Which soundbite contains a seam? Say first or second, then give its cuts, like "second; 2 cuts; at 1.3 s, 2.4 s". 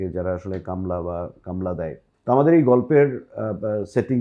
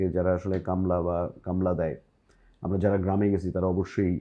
first; 1 cut; at 2.1 s